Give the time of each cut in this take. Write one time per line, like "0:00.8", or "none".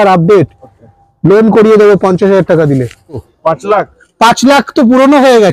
0:03.2